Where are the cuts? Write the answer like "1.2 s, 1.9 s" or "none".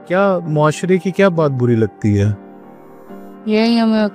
none